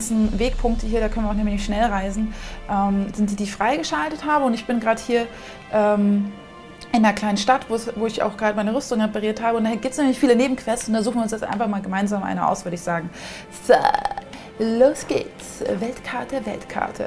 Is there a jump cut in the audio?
yes; 1 cut; at 1.2 s

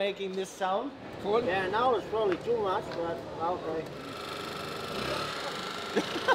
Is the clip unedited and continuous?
no; 2 cuts; at 1.4 s, 5.3 s

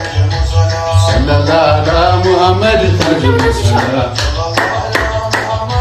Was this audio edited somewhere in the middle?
no; 0 cuts

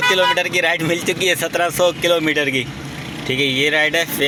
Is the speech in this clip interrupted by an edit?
no; 0 cuts

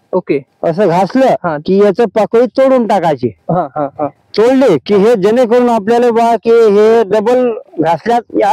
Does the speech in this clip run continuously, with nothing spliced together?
yes; 0 cuts

